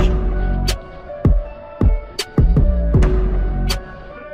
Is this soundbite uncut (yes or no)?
yes